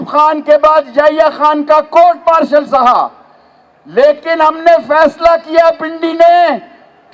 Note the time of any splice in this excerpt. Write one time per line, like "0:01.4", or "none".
none